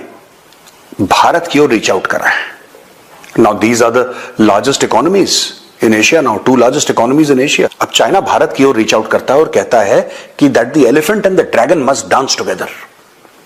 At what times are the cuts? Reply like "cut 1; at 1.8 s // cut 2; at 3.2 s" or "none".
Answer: none